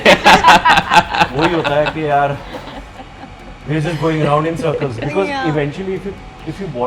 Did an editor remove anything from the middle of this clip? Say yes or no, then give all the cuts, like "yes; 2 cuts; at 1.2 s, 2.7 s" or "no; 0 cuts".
no; 0 cuts